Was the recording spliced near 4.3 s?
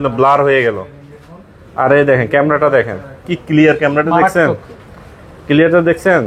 no; 0 cuts

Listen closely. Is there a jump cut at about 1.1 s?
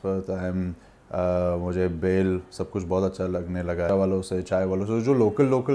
no; 1 cut; at 3.9 s

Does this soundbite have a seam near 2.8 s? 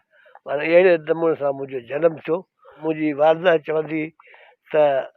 yes; 1 cut; at 2.8 s

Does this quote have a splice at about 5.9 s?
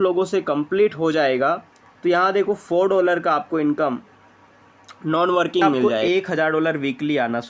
yes; 1 cut; at 5.9 s

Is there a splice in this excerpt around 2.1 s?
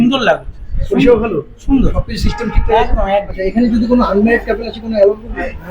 no; 1 cut; at 3.4 s

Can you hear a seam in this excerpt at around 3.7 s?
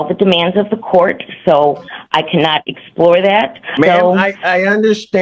yes; 1 cut; at 3.7 s

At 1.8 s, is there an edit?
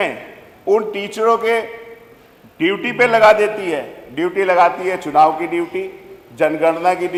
no; 0 cuts

